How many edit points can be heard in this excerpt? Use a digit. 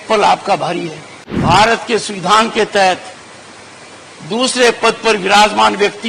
1